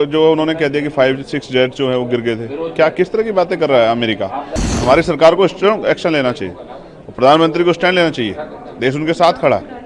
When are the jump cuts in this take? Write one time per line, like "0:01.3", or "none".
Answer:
0:04.7

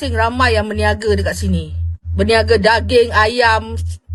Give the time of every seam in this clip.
none

